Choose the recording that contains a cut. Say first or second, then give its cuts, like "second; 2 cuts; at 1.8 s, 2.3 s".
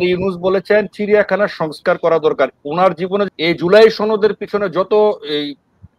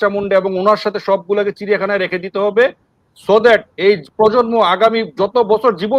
first; 1 cut; at 3.3 s